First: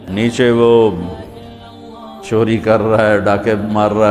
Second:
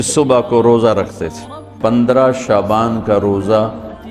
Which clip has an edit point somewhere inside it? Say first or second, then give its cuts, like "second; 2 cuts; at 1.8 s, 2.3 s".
second; 1 cut; at 1.9 s